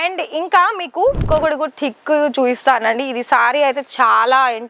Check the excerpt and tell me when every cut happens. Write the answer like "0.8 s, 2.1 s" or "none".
1.2 s